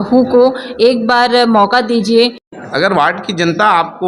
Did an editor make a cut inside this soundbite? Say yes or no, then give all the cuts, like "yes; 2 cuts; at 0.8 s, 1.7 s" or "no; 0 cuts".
yes; 1 cut; at 2.5 s